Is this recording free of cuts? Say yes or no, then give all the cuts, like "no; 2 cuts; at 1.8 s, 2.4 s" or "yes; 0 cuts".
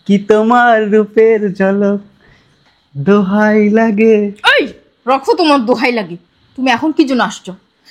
yes; 0 cuts